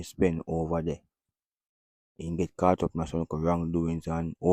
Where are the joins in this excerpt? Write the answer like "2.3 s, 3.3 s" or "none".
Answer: none